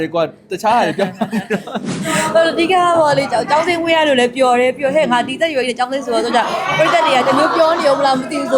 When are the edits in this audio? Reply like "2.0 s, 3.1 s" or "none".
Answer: 1.8 s